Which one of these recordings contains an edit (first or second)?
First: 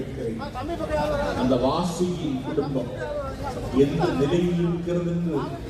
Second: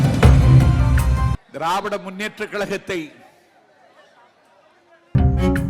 second